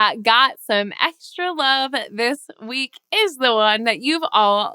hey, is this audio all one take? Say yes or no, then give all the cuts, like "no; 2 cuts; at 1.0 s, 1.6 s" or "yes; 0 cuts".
yes; 0 cuts